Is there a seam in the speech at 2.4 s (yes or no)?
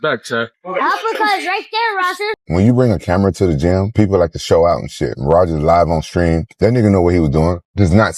yes